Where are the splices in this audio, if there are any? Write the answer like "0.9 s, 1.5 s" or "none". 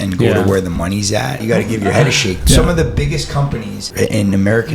1.4 s, 2.4 s, 3.8 s